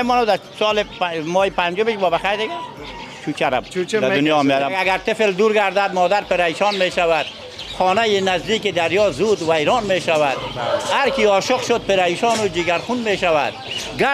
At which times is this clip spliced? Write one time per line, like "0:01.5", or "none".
0:04.7